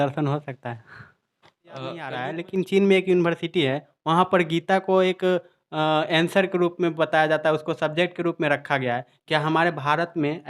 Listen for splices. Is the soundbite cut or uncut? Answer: cut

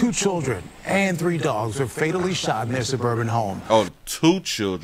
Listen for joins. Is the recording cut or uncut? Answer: uncut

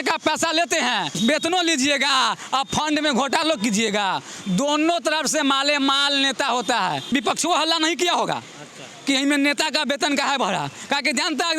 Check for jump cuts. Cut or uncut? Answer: cut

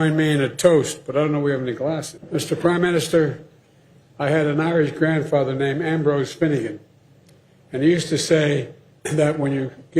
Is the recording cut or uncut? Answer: cut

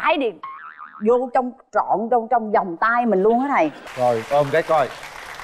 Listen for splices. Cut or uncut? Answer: cut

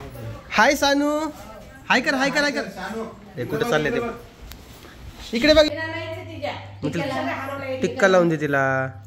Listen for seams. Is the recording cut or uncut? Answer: cut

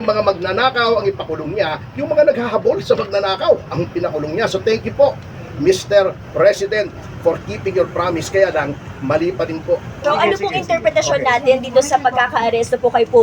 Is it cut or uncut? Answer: cut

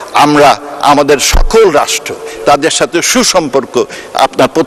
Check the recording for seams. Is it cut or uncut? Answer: uncut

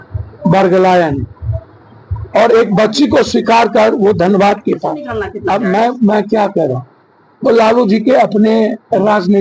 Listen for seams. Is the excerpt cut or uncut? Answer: cut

